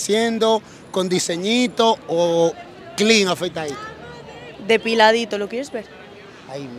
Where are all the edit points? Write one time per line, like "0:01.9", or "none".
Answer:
none